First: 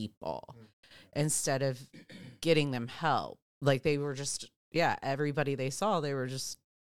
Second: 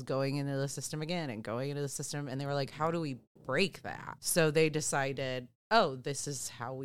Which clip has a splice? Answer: second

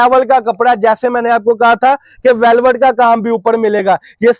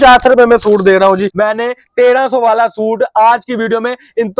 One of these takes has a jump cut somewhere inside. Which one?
second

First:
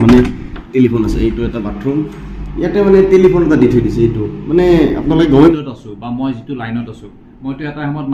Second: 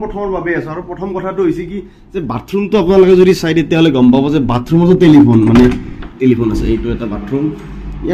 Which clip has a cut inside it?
first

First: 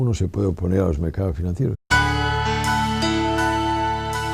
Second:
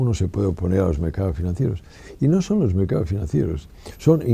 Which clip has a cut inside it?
second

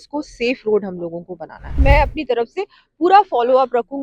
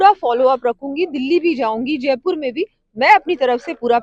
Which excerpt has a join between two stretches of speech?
first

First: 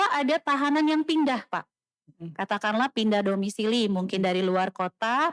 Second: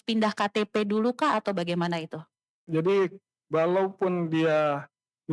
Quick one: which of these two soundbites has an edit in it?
second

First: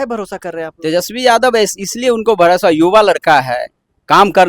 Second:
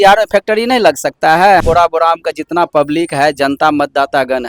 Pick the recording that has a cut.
second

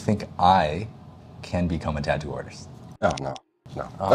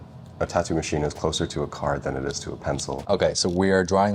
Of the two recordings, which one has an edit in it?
second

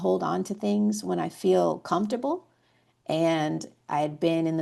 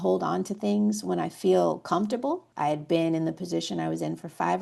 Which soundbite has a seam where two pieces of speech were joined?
second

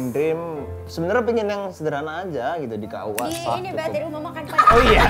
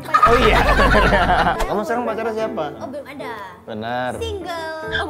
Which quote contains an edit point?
second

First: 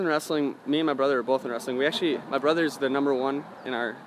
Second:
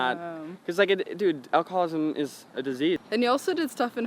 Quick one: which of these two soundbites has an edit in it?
second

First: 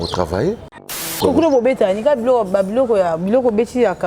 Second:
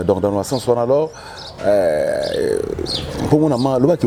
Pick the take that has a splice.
first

